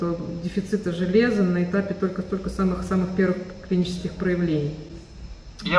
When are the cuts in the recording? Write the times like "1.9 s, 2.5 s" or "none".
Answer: none